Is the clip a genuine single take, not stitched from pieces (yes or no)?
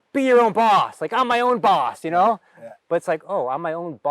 yes